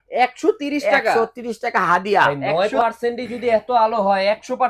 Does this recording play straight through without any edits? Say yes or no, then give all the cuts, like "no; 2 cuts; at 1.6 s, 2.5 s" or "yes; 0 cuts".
no; 1 cut; at 2.3 s